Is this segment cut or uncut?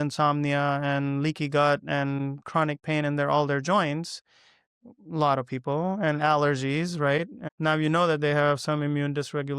cut